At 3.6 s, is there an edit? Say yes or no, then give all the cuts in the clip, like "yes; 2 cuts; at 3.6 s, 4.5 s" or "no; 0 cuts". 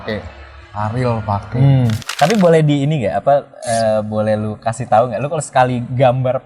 no; 1 cut; at 2.0 s